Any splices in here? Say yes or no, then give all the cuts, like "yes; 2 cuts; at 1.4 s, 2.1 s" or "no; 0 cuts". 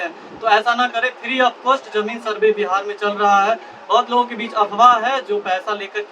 no; 0 cuts